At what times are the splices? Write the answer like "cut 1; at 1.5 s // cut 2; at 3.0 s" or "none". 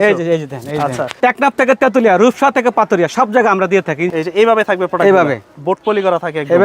cut 1; at 1.1 s // cut 2; at 4.0 s